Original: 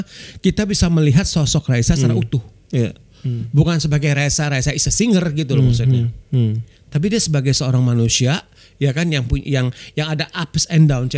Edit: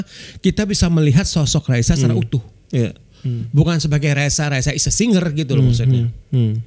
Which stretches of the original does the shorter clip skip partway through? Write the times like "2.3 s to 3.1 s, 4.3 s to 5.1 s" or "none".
none